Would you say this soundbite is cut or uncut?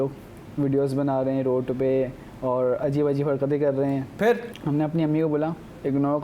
uncut